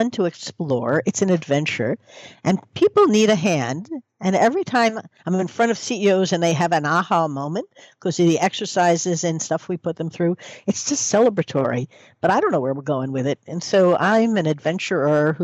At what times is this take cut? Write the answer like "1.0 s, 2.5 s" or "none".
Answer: 5.1 s

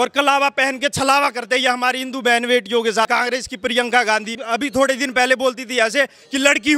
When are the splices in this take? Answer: 3.1 s, 4.4 s

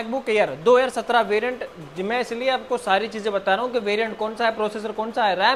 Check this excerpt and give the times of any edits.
none

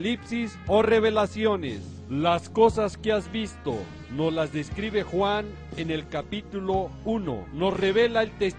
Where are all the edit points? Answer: 7.2 s

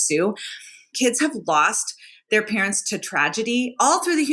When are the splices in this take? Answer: 0.9 s

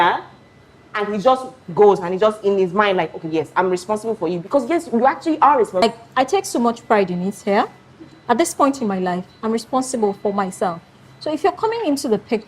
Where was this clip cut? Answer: 5.8 s

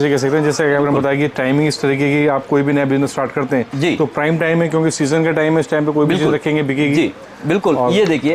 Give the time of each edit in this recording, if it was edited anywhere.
none

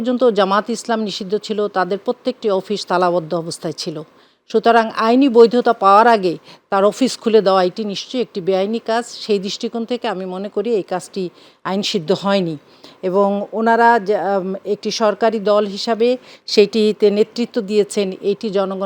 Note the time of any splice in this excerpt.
none

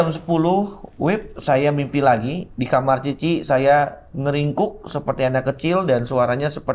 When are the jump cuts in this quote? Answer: none

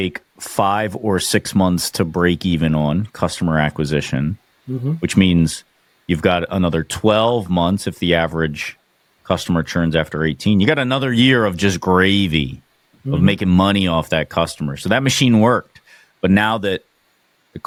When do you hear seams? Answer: none

